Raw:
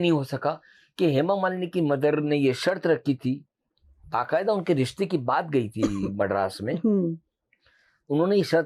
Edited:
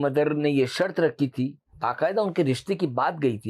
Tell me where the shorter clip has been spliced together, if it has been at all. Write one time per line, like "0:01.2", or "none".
0:01.7